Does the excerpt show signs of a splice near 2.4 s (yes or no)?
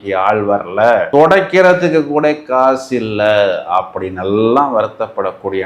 no